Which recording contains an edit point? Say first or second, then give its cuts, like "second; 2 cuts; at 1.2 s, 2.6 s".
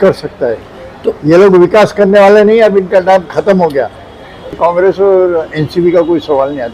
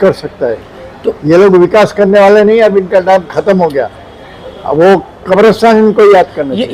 first; 1 cut; at 4.6 s